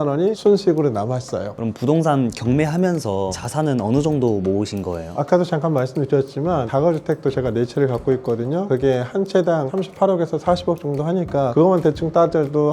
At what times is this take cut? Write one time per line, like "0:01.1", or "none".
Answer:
0:01.4
0:11.5